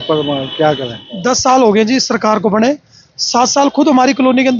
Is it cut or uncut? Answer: cut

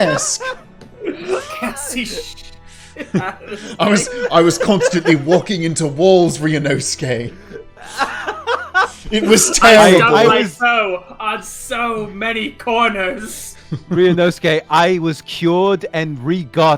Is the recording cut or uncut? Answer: uncut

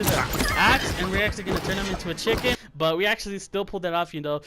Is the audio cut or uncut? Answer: cut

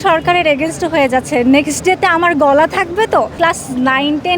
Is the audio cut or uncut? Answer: cut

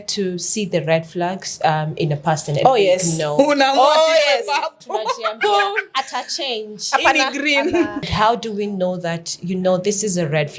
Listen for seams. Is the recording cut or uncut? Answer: cut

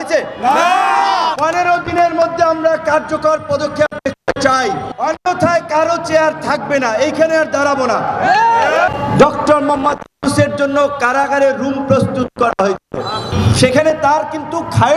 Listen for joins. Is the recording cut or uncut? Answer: cut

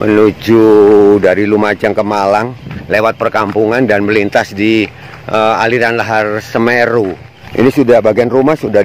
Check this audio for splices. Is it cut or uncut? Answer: cut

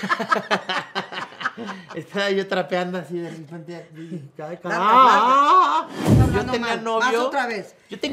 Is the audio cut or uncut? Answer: cut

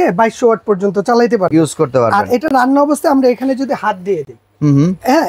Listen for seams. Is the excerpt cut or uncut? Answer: uncut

